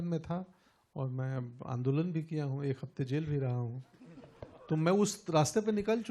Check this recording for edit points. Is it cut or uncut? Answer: uncut